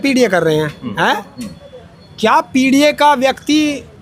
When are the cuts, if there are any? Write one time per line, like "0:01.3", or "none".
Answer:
none